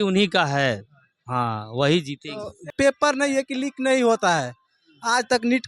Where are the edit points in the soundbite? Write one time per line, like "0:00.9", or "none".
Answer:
0:02.6